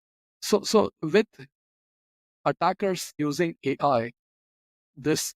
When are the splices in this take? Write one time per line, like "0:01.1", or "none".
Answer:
0:01.0
0:03.1